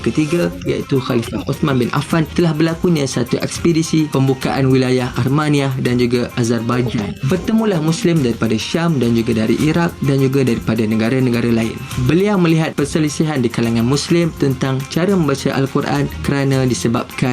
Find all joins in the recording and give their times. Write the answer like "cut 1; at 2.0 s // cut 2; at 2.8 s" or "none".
cut 1; at 7.6 s